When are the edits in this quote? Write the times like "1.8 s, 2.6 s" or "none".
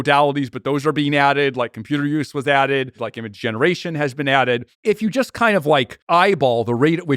3.1 s, 4.7 s, 6.0 s